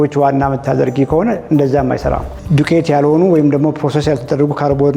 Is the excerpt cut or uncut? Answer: cut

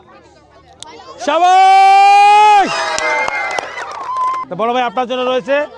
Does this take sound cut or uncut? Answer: cut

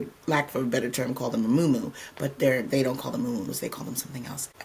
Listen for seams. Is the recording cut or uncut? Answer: uncut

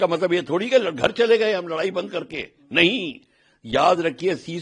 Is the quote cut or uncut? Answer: uncut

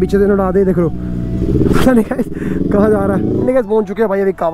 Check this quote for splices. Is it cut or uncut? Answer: cut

